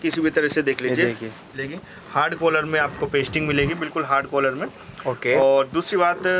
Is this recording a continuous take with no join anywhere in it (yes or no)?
no